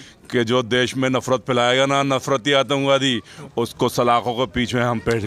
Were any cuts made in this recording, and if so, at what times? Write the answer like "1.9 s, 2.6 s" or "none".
none